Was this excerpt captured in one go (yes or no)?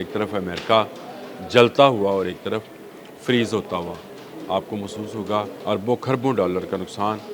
no